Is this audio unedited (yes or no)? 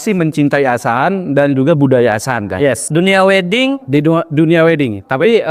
no